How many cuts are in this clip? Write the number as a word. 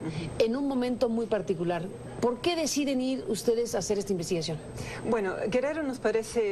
one